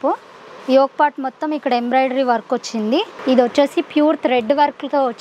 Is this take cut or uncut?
cut